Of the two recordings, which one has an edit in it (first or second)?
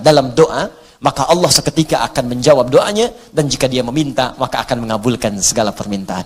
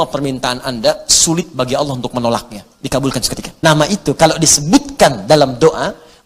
second